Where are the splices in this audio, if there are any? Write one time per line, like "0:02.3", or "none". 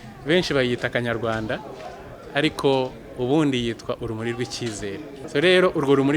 0:05.1